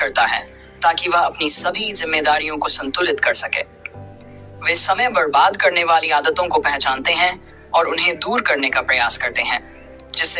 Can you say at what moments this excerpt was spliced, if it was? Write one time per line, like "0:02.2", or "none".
none